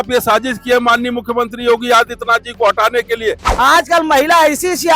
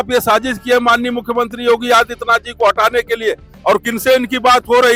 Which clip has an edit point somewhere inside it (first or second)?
first